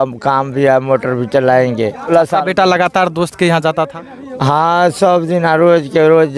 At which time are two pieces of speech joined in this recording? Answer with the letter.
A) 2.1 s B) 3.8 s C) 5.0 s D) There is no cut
A